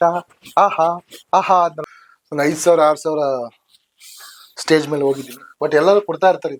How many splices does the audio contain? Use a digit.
1